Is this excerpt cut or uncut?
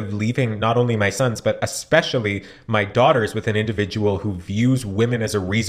uncut